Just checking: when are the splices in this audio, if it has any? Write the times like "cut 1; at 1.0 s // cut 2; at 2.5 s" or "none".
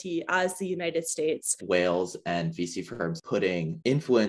cut 1; at 1.6 s // cut 2; at 3.2 s